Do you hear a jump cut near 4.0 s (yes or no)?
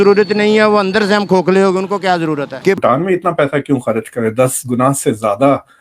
no